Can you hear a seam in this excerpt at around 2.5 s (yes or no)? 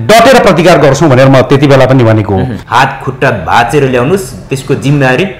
yes